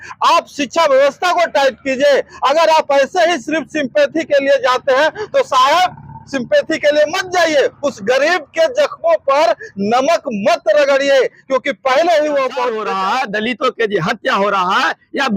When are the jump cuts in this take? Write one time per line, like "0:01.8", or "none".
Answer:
0:12.8